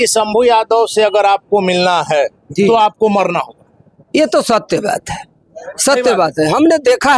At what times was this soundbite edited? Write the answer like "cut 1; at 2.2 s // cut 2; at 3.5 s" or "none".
none